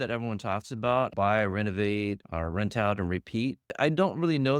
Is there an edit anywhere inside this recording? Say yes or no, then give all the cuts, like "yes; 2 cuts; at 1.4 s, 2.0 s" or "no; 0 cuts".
yes; 3 cuts; at 1.1 s, 2.3 s, 3.7 s